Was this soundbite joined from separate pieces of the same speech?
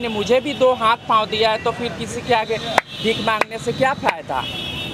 no; 0 cuts

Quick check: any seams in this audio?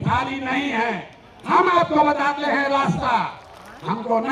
no; 0 cuts

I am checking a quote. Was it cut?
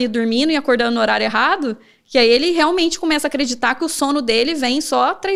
no; 0 cuts

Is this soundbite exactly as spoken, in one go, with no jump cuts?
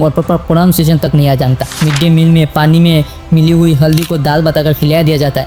yes; 0 cuts

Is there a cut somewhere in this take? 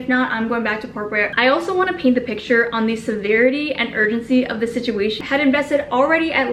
yes; 2 cuts; at 1.3 s, 5.2 s

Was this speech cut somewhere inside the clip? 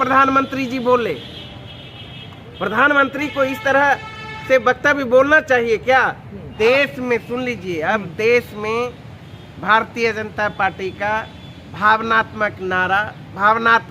yes; 1 cut; at 6.5 s

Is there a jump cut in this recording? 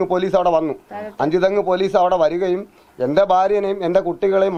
no; 0 cuts

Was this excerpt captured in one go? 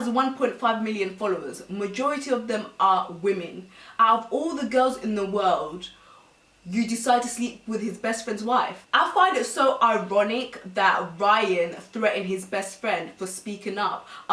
yes; 0 cuts

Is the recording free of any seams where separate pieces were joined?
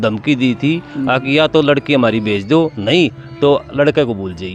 yes; 0 cuts

